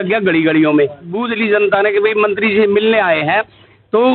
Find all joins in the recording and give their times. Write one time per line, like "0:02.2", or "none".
0:01.3